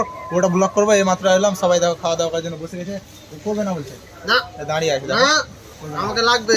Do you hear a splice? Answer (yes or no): no